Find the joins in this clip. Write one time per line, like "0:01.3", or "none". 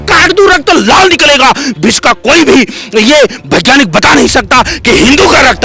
none